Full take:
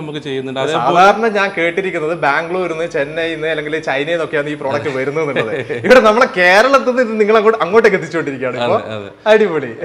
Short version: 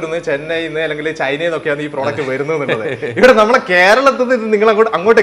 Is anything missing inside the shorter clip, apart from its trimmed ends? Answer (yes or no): no